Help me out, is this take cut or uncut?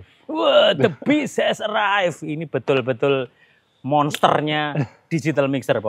uncut